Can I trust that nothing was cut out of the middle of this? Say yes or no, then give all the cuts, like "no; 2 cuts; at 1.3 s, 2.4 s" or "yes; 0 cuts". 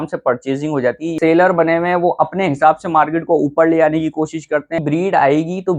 no; 2 cuts; at 1.2 s, 4.8 s